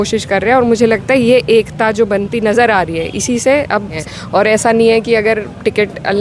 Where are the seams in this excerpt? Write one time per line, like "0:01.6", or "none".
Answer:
0:04.0